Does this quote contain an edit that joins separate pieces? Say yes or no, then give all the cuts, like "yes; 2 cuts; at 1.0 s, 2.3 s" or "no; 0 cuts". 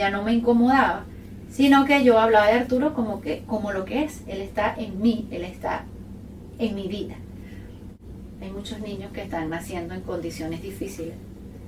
yes; 1 cut; at 8.0 s